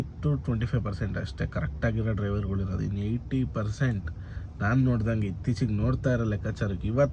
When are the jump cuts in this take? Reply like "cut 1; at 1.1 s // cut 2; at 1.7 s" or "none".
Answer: none